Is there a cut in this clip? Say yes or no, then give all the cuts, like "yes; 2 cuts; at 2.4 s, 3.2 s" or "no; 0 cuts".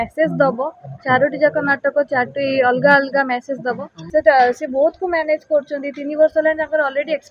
yes; 1 cut; at 3.9 s